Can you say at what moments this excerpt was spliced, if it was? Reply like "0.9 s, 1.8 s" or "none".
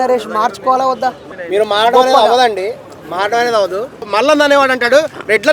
1.3 s, 4.0 s